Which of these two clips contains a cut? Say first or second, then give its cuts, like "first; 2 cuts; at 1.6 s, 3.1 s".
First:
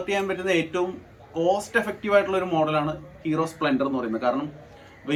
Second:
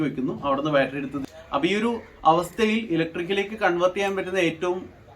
second; 1 cut; at 1.2 s